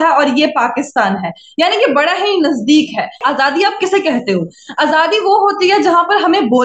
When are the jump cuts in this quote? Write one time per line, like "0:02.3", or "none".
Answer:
0:03.2